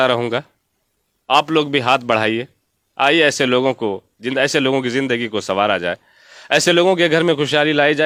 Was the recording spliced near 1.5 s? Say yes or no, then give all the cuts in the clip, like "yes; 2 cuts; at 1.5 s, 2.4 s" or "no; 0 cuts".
no; 0 cuts